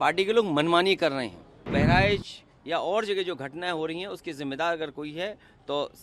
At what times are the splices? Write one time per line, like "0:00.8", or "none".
0:01.7